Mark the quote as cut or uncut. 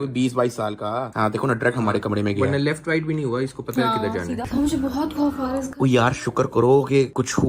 cut